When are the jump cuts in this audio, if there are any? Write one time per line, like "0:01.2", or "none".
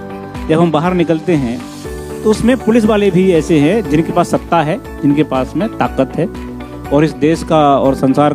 none